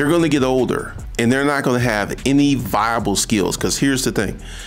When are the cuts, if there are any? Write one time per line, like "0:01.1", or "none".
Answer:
none